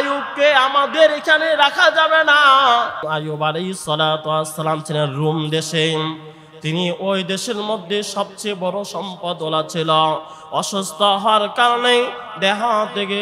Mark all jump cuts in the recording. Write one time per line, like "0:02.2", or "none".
none